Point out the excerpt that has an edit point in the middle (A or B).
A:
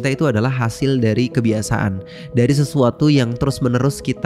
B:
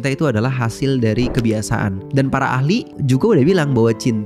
B